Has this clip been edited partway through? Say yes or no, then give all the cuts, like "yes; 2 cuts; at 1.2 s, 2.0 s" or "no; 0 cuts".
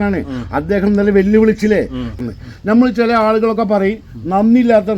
yes; 1 cut; at 2.1 s